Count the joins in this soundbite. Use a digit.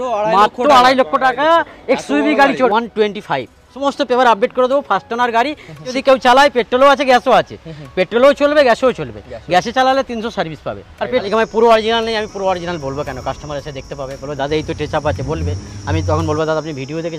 4